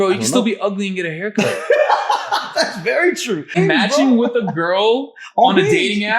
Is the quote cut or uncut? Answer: cut